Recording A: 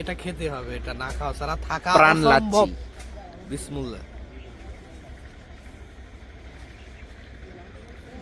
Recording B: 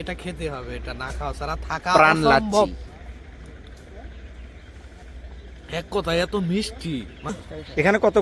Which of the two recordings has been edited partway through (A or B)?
B